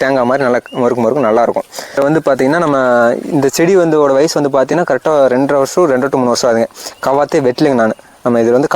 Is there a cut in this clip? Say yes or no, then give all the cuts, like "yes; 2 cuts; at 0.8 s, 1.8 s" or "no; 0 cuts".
yes; 1 cut; at 2.0 s